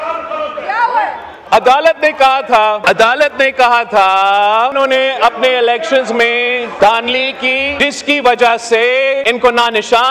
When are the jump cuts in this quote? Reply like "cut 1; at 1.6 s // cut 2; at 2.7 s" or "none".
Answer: cut 1; at 2.8 s // cut 2; at 4.7 s // cut 3; at 6.7 s // cut 4; at 7.7 s // cut 5; at 9.2 s